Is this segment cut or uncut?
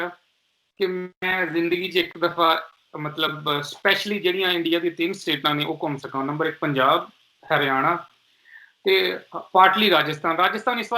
uncut